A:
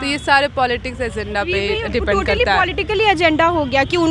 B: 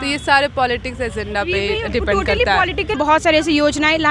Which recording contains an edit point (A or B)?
B